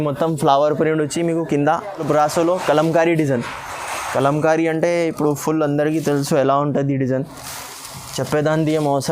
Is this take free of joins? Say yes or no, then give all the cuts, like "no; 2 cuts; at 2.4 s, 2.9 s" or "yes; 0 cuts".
no; 1 cut; at 2.0 s